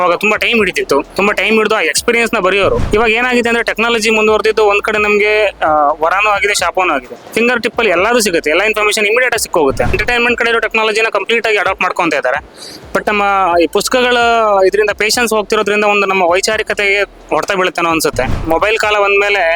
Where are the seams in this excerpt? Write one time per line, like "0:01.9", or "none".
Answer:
0:01.1
0:02.8
0:07.2
0:10.0
0:18.4